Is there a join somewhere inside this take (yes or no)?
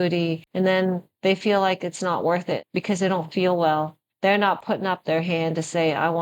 yes